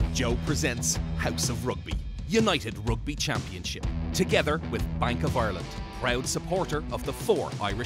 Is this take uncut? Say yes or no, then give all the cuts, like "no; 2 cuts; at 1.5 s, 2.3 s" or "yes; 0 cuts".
yes; 0 cuts